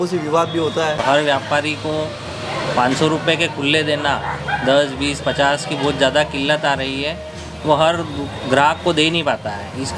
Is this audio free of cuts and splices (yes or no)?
no